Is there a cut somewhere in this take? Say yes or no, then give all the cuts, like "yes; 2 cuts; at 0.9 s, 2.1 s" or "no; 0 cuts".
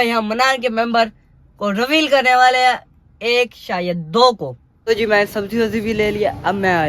yes; 1 cut; at 4.7 s